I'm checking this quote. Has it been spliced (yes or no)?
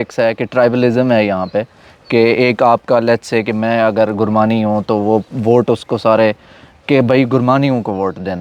no